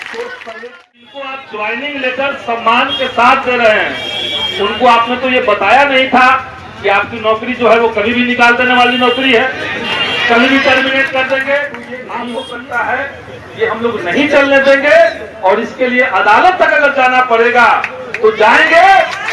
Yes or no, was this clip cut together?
yes